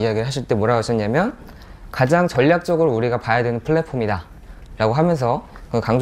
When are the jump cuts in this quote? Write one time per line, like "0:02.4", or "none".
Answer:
none

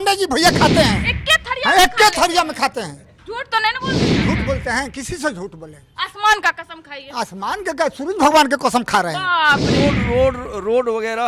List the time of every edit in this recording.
0:09.7

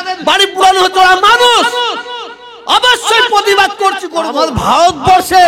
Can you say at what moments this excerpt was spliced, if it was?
0:04.2

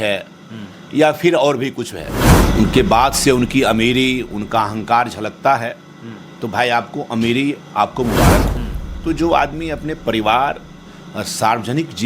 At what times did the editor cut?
0:02.4
0:08.6

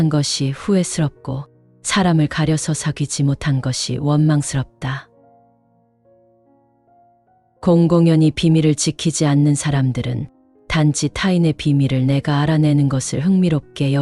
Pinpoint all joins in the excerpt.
0:05.1
0:07.6

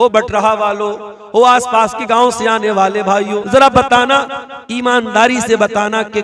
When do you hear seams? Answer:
0:03.4

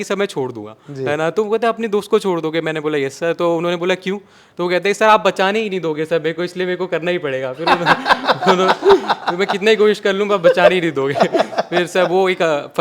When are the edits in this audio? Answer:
none

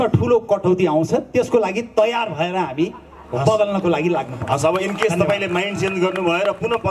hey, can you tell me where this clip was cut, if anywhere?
none

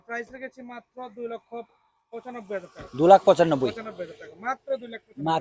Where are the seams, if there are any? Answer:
none

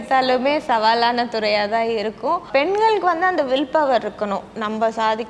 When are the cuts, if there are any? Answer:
0:02.5

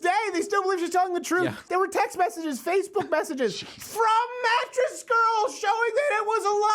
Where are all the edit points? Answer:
0:01.7

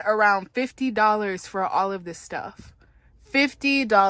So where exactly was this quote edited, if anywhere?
none

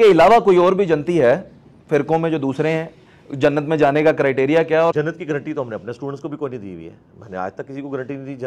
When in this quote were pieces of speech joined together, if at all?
0:04.9

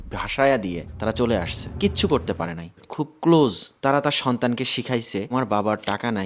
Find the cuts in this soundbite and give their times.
0:02.8
0:05.3

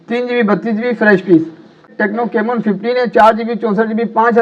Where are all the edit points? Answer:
0:01.9

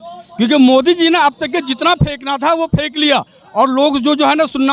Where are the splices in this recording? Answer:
none

